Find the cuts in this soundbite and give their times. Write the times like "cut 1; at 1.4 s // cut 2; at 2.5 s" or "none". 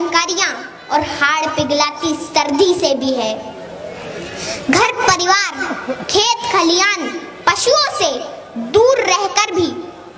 none